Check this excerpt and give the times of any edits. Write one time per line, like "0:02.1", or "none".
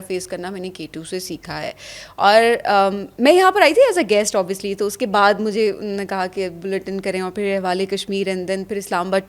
none